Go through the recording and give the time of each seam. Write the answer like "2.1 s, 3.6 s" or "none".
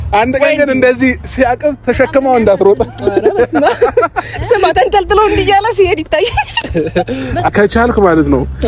7.5 s